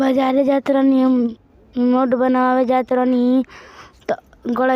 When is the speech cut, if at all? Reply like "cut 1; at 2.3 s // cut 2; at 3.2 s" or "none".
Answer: cut 1; at 1.3 s